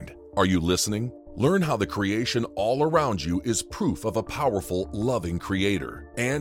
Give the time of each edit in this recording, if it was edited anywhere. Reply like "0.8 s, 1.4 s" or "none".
1.2 s